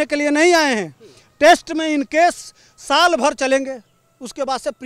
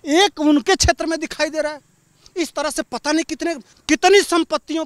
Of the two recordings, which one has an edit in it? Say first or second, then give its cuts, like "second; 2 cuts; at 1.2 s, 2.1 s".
second; 1 cut; at 3.7 s